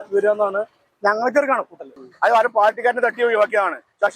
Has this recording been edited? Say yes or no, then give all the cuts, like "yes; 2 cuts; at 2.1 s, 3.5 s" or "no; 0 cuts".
yes; 1 cut; at 2.0 s